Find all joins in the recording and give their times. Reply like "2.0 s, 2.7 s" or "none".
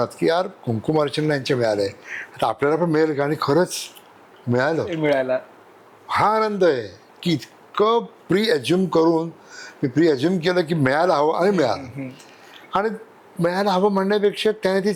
none